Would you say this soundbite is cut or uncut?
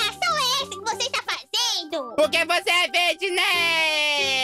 cut